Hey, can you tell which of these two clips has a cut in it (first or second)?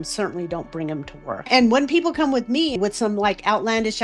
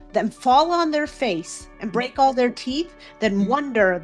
first